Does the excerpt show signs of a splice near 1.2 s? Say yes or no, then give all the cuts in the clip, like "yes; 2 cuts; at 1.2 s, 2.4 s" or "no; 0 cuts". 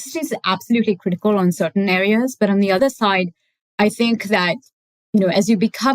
no; 1 cut; at 2.8 s